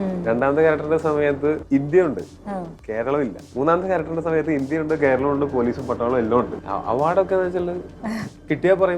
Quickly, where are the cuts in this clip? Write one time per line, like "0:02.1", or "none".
0:01.6
0:03.4
0:06.6